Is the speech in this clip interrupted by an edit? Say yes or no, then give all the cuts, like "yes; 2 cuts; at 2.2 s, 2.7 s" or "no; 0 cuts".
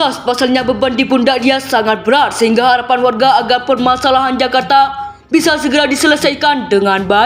no; 0 cuts